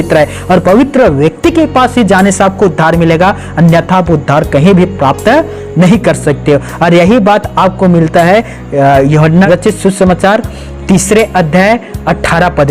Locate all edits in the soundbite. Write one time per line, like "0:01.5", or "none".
0:09.5